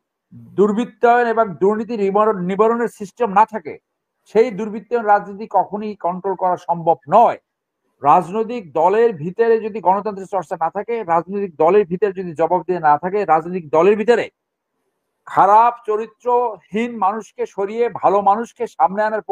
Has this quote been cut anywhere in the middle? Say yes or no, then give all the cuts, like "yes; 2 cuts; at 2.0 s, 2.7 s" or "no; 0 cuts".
no; 0 cuts